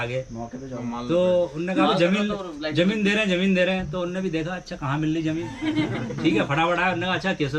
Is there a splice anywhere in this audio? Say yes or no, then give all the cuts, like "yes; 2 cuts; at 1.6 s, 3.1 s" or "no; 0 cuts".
no; 0 cuts